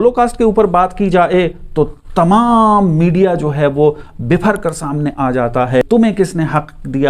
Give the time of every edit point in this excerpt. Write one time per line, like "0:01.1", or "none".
0:05.8